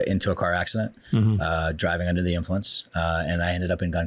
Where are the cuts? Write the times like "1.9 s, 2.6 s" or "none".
none